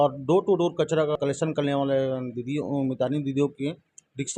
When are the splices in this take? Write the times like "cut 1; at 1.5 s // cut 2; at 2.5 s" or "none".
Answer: cut 1; at 1.2 s